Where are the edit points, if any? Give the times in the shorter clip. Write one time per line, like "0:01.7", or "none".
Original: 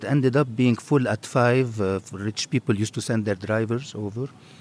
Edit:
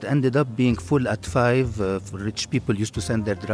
none

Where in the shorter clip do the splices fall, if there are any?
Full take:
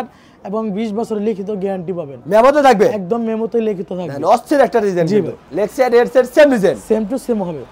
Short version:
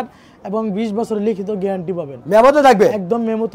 none

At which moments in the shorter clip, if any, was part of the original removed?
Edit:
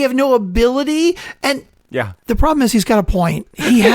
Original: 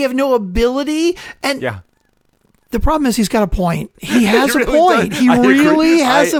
0:01.6

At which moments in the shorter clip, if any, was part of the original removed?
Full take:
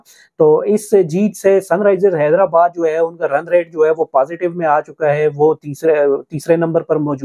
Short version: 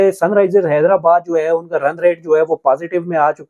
none

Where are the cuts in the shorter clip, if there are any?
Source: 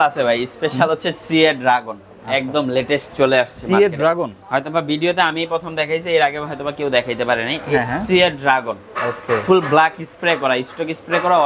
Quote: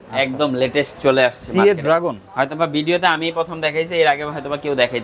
none

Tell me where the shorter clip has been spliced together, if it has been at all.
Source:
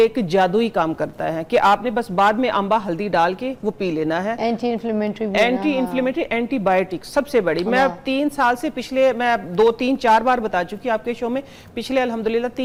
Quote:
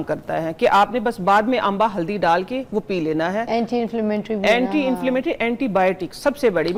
none

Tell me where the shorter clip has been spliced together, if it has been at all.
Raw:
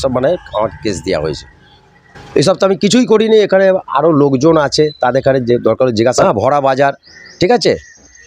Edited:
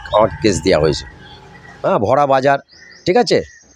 0:01.9

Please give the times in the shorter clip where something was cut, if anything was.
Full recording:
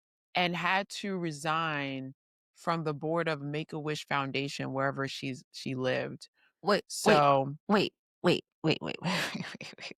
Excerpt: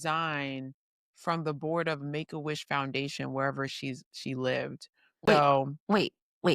0:05.1

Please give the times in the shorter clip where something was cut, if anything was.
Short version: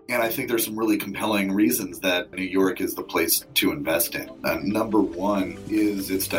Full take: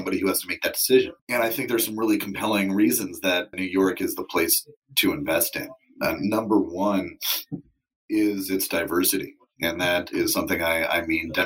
0:03.4
0:04.2
0:05.6

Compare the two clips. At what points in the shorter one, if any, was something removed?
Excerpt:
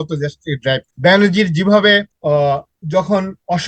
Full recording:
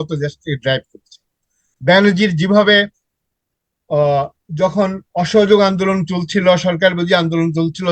0:00.9
0:02.1

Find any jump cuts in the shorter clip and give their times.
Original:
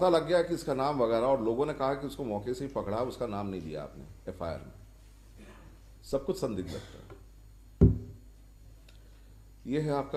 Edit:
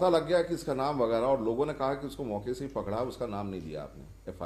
none

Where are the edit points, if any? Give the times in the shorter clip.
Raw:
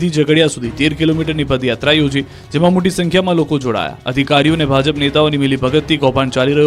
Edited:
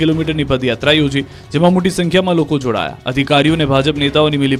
none

